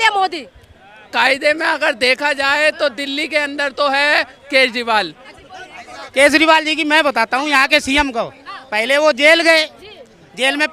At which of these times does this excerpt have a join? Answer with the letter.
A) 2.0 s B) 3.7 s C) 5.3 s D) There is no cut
C